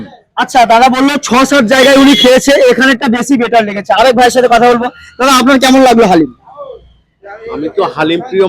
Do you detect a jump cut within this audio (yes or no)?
no